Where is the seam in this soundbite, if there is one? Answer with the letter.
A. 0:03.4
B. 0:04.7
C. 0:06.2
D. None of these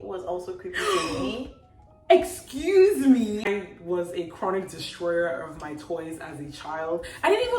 A